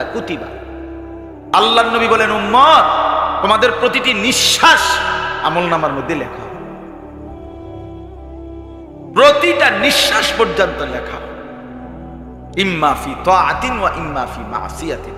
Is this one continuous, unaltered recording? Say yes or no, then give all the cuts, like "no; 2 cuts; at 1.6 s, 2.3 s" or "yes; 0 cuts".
yes; 0 cuts